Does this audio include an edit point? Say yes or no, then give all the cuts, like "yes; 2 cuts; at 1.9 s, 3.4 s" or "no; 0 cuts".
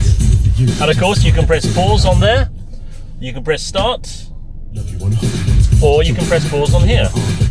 no; 0 cuts